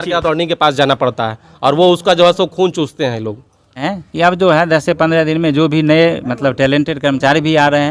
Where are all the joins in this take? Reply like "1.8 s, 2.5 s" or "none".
3.8 s

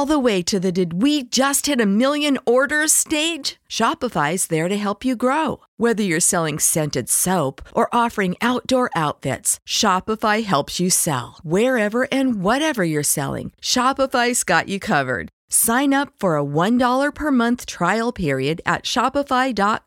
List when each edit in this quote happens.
none

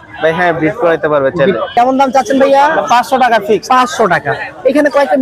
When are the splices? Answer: 1.7 s

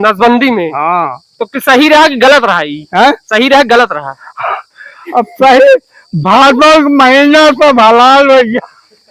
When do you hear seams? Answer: none

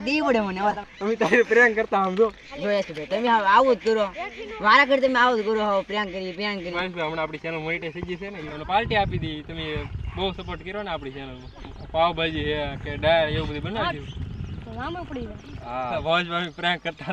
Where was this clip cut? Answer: 0.8 s, 2.5 s, 4.2 s, 6.7 s, 8.5 s, 11.6 s, 15.9 s

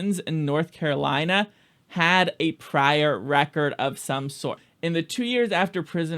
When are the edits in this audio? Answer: 4.6 s

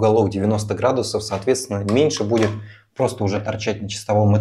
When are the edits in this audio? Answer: none

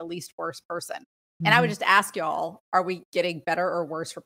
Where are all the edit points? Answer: 1.2 s, 3.0 s

